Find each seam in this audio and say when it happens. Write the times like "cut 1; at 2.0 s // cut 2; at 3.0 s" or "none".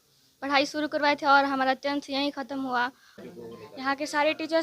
cut 1; at 3.1 s